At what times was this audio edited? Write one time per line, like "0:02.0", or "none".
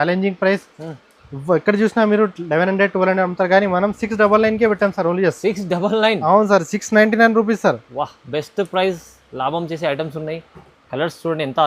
none